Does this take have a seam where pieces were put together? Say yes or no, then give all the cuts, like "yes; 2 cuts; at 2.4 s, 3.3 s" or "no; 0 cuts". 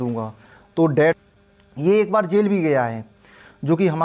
yes; 1 cut; at 1.1 s